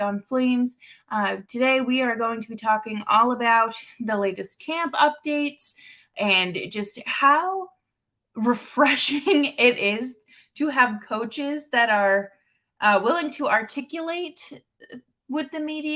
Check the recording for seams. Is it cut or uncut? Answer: uncut